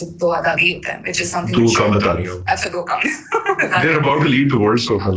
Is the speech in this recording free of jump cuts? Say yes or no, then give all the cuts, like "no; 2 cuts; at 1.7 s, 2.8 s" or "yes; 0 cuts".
yes; 0 cuts